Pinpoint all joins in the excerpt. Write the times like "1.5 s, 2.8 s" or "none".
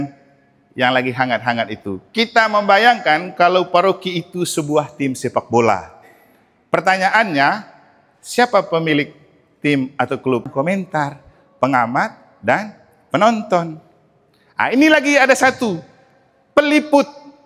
10.5 s